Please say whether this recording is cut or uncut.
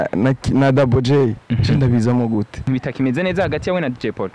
cut